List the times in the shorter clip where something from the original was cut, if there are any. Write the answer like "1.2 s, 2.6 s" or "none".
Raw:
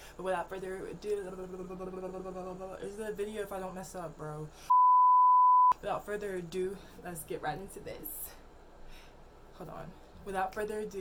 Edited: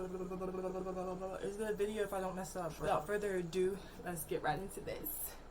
2.9 s